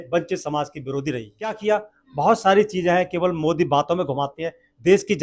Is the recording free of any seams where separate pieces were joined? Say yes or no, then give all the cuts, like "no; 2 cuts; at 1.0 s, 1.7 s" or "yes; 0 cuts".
no; 1 cut; at 1.6 s